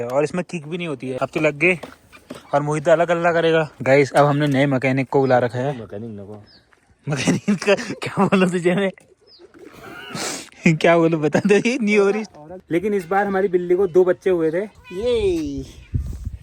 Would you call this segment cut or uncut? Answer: cut